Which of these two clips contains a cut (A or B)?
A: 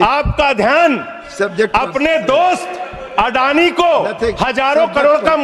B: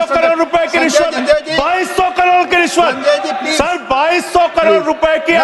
B